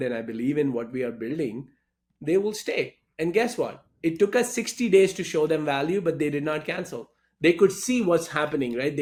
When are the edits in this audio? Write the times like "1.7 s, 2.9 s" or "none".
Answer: none